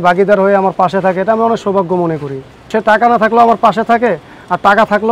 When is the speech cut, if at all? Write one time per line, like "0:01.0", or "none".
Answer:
0:02.7